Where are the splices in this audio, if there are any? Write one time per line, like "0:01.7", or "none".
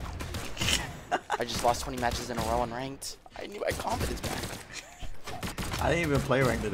0:05.6